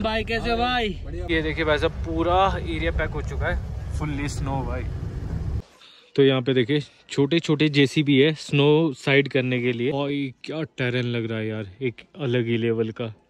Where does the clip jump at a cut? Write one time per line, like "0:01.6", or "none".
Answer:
0:01.3
0:05.6
0:09.9